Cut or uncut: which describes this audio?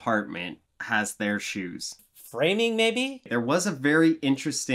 cut